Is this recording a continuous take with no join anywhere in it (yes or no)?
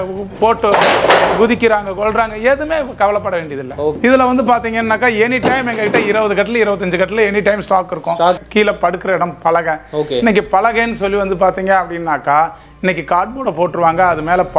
no